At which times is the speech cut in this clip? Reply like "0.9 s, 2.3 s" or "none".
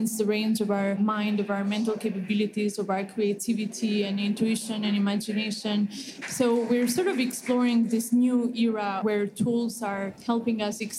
1.0 s, 6.1 s, 9.0 s, 10.2 s